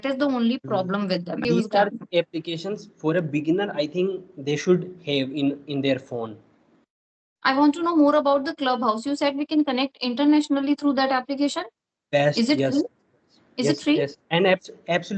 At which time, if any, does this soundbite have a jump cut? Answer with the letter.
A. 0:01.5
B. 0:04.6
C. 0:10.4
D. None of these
A